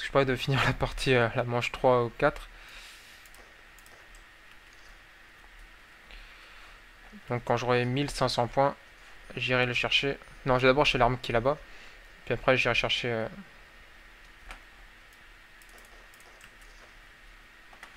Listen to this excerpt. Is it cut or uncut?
cut